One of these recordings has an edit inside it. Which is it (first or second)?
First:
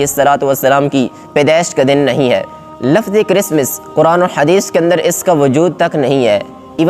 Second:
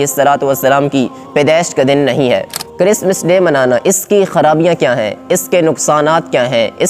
second